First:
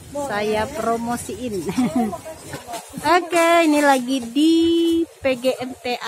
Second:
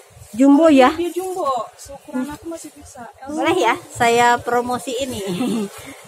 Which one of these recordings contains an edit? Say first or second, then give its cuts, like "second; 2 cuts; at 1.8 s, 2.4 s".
second; 1 cut; at 3.2 s